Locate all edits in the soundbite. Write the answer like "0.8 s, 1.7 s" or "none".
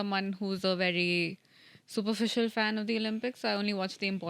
none